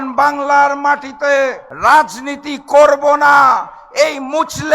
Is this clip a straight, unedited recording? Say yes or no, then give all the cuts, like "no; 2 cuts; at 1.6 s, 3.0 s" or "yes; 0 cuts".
no; 1 cut; at 1.7 s